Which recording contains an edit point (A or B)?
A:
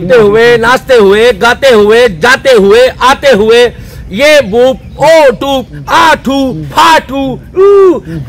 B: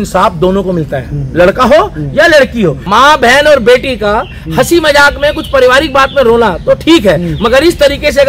B